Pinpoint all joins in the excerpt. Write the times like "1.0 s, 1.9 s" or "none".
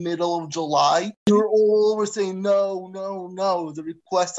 1.3 s